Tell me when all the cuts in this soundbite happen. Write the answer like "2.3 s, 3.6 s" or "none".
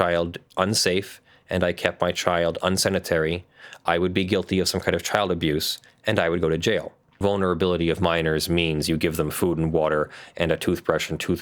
7.1 s